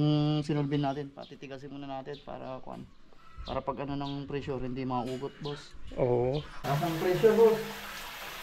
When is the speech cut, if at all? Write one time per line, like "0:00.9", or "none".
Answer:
0:06.5